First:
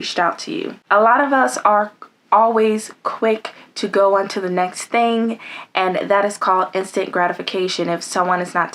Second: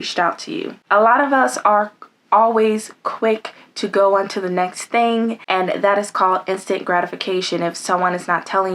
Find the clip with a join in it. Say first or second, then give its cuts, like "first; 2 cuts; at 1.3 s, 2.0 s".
second; 1 cut; at 5.4 s